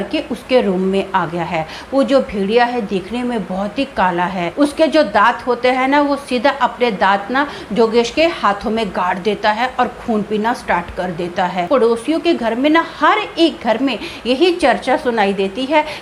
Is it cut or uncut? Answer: cut